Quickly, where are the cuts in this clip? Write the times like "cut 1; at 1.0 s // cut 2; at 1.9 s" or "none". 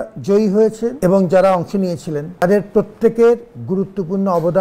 cut 1; at 1.0 s // cut 2; at 2.4 s

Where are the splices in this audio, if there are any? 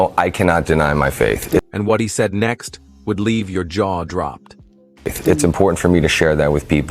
none

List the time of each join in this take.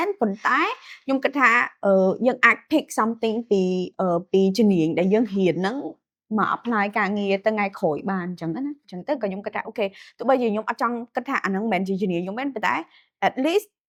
none

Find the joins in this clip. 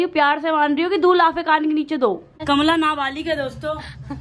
cut 1; at 2.4 s

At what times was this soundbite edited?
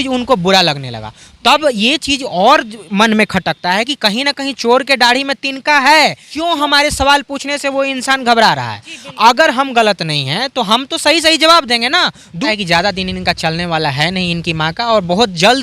cut 1; at 6.3 s // cut 2; at 12.5 s

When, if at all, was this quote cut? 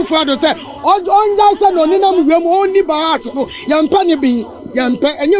none

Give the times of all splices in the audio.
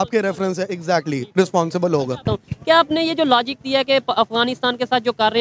cut 1; at 2.3 s

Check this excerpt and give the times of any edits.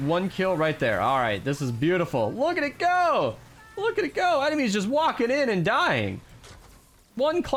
none

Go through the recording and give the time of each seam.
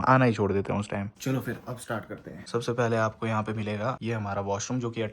cut 1; at 1.2 s // cut 2; at 2.4 s // cut 3; at 4.0 s

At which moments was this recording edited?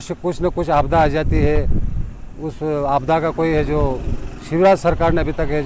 none

